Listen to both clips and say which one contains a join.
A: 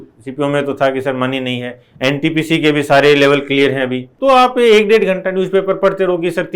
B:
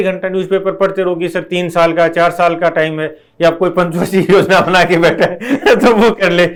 A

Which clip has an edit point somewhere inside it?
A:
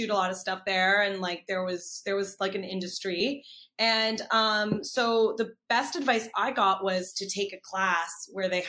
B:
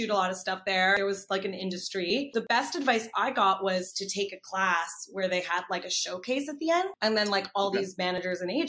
B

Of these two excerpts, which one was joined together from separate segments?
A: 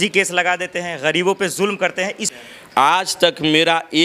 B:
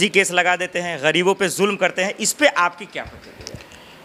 A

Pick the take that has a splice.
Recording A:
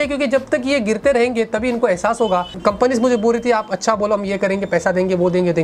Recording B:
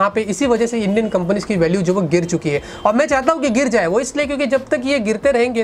A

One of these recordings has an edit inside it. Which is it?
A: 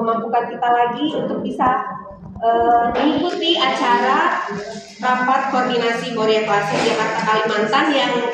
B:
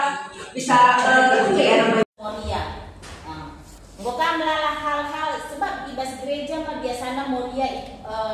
B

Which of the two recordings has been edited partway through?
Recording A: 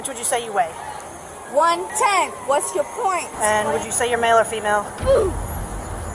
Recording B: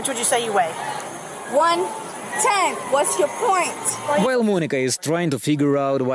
A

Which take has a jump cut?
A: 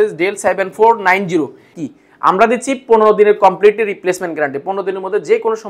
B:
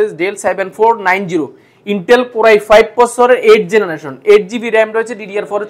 A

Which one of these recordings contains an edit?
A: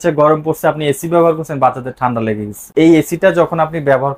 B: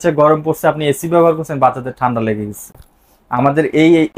A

